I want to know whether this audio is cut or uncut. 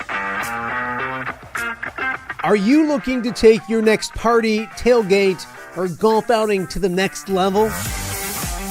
uncut